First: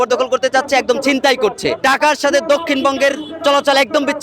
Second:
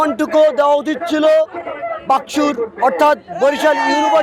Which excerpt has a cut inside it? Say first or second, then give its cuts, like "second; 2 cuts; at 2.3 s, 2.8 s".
first; 1 cut; at 1.8 s